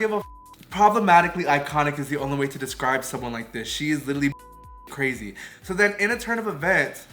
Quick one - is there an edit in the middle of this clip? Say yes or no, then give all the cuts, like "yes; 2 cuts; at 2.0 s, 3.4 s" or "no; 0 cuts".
no; 0 cuts